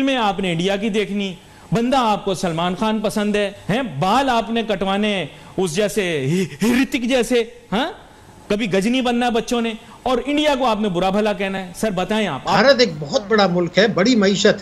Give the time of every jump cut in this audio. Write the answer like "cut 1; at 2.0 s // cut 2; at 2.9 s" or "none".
cut 1; at 3.6 s // cut 2; at 12.5 s